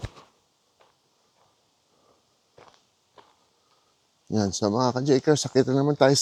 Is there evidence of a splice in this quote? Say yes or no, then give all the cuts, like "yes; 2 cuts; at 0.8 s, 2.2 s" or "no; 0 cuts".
no; 0 cuts